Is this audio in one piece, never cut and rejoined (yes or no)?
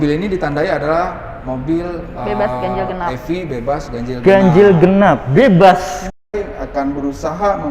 no